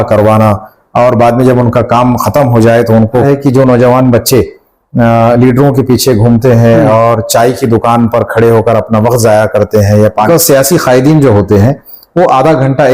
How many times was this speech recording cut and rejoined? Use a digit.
2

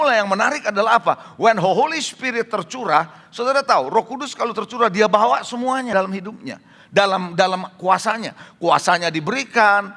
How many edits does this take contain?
1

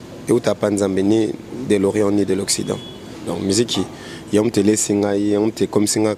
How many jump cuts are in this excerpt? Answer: 1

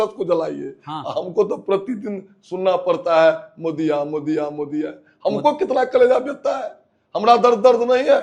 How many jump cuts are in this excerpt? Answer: 0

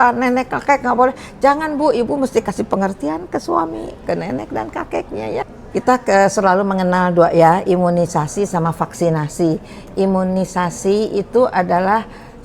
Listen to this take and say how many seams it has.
1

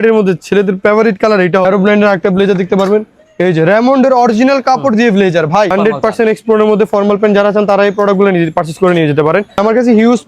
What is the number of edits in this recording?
3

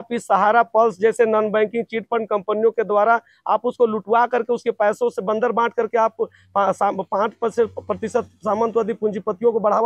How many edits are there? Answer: 0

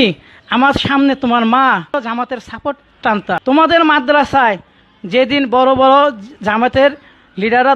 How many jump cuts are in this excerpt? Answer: 2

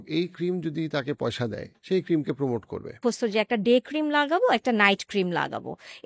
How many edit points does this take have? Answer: 2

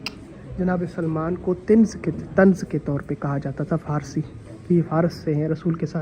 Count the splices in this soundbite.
0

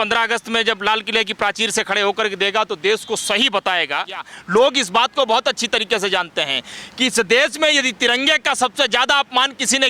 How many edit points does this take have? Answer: 1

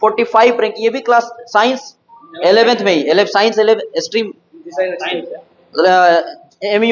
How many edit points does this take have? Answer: 0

